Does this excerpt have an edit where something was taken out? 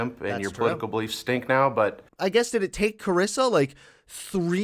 yes; 1 cut; at 2.0 s

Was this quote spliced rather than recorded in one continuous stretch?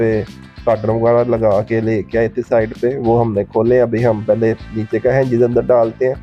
no; 0 cuts

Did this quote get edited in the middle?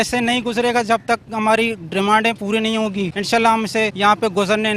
yes; 2 cuts; at 3.2 s, 3.9 s

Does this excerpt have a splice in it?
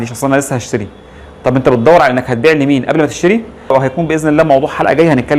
yes; 1 cut; at 3.7 s

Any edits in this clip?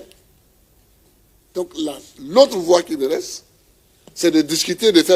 no; 0 cuts

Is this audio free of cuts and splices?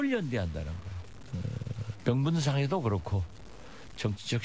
yes; 0 cuts

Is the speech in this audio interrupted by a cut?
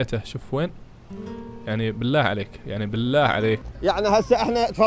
yes; 1 cut; at 3.6 s

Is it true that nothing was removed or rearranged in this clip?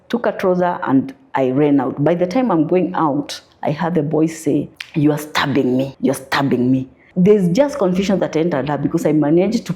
no; 3 cuts; at 4.8 s, 5.9 s, 7.0 s

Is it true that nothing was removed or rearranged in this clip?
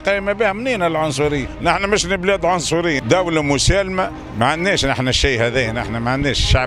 no; 3 cuts; at 1.5 s, 3.0 s, 4.2 s

